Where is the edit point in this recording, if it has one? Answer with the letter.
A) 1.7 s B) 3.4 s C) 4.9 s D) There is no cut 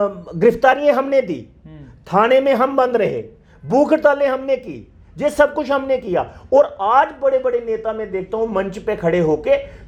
D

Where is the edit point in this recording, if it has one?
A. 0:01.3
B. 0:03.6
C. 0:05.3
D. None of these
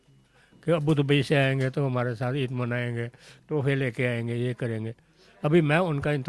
D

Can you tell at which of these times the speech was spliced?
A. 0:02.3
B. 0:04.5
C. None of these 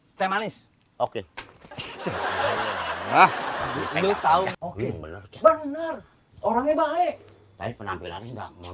B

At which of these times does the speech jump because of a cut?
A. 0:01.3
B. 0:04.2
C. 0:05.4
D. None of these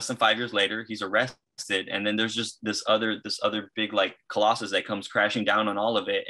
D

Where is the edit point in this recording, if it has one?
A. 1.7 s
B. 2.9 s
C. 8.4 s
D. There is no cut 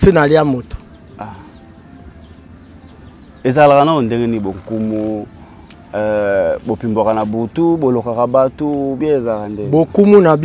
D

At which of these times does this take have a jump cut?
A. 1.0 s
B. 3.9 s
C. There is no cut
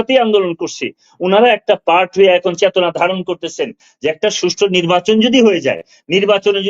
B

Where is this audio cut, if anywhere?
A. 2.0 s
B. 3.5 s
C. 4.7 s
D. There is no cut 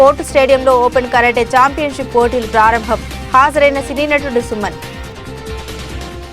C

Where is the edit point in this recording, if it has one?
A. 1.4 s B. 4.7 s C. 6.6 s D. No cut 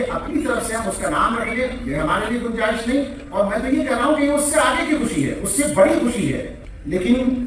C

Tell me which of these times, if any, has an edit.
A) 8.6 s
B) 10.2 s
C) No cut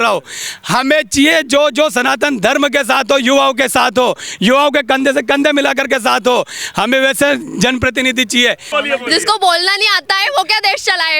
A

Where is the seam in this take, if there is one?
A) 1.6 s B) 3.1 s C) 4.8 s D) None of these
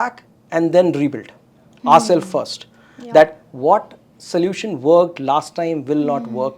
D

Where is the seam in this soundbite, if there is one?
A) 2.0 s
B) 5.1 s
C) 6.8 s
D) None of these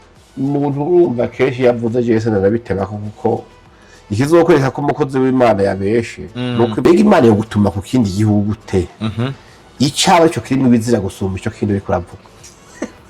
C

